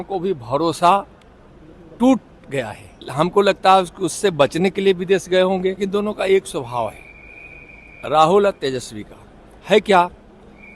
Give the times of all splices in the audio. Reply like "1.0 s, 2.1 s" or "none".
3.0 s, 5.8 s